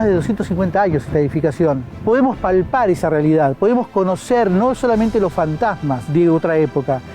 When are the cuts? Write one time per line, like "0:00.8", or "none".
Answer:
0:01.9
0:06.0